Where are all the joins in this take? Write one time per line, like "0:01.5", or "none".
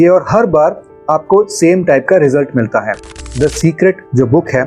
0:03.2